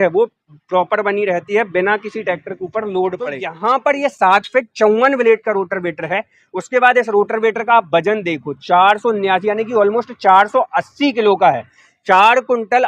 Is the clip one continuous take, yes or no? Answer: no